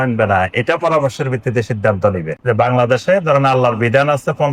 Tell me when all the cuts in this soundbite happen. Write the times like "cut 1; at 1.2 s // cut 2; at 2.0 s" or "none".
none